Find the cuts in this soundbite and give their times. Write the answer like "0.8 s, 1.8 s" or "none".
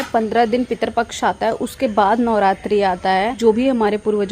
3.4 s